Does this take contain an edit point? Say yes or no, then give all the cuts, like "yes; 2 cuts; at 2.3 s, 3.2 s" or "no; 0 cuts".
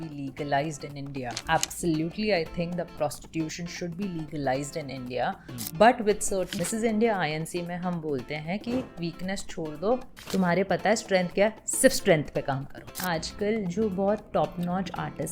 yes; 4 cuts; at 1.4 s, 2.9 s, 6.6 s, 13.0 s